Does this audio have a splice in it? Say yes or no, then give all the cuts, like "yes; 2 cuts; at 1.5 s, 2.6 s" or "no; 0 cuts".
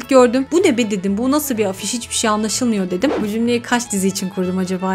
yes; 1 cut; at 3.2 s